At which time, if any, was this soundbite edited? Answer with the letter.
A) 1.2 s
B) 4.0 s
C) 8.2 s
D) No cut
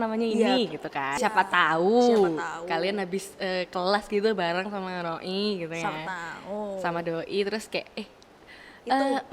A